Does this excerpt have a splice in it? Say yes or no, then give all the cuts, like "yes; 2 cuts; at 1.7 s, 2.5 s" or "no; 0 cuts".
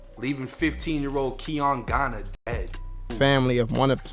yes; 2 cuts; at 1.6 s, 3.1 s